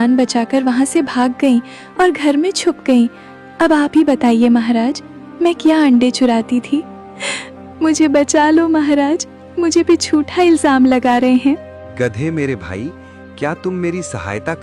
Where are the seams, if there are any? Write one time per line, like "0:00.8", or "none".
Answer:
0:11.8